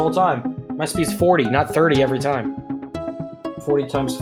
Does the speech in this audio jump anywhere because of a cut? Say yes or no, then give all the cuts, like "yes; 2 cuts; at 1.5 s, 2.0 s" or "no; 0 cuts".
yes; 1 cut; at 3.1 s